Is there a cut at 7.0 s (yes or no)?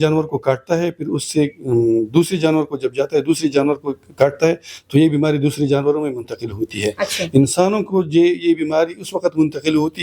no